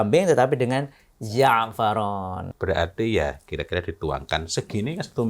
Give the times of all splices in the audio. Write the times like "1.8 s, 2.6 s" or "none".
2.5 s